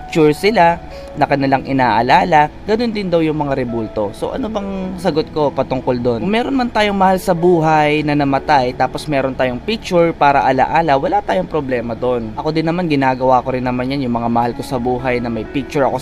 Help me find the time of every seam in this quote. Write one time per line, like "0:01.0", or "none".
none